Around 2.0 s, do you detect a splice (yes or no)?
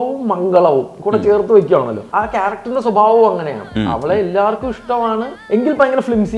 yes